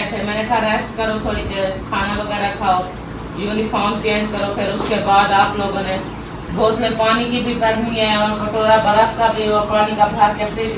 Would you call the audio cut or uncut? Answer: uncut